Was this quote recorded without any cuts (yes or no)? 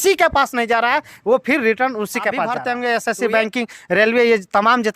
no